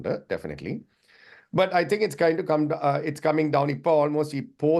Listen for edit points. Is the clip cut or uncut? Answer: uncut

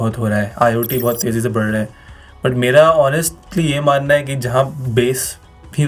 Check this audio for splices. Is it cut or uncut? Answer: uncut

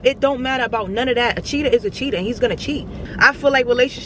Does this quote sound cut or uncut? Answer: cut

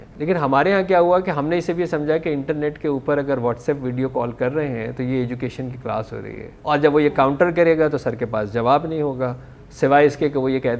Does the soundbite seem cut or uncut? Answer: cut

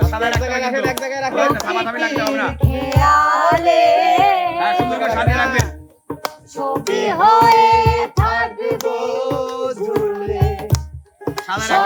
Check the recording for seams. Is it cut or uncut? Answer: uncut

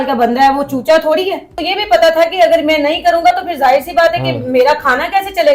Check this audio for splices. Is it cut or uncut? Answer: cut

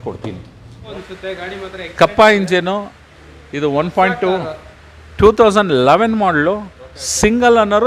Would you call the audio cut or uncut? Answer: cut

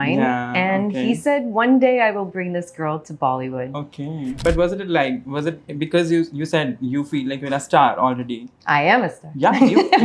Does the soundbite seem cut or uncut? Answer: cut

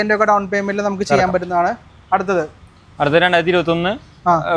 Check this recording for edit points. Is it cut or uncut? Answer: uncut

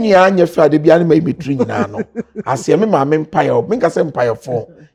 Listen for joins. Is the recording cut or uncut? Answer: uncut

